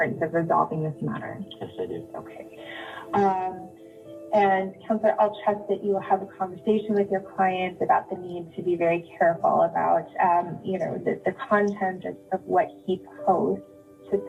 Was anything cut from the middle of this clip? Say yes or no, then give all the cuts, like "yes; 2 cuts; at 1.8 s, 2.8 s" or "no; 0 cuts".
no; 0 cuts